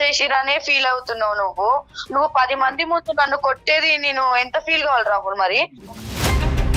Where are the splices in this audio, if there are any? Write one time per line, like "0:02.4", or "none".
0:05.8